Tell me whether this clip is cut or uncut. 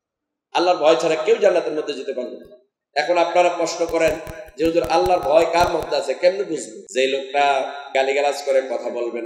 cut